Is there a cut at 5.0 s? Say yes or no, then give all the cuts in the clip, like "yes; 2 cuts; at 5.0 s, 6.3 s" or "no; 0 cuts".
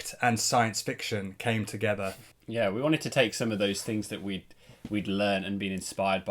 no; 1 cut; at 2.3 s